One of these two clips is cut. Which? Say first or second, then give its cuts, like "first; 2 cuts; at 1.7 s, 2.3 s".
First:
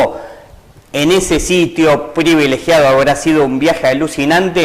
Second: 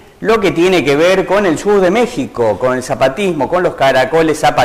first; 1 cut; at 1.1 s